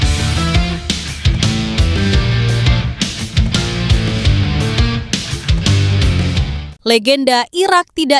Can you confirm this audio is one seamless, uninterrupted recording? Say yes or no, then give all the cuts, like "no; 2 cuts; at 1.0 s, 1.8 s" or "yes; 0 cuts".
yes; 0 cuts